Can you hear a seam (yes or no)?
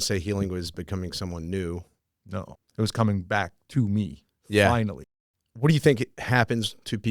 yes